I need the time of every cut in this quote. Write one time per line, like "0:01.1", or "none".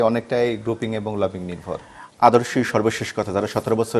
0:02.0